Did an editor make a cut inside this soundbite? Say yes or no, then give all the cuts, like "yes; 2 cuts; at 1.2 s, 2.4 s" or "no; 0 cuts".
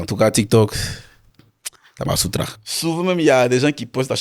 yes; 1 cut; at 2.5 s